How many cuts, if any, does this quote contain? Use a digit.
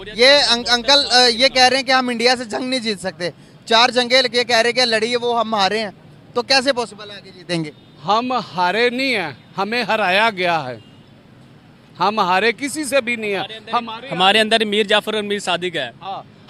0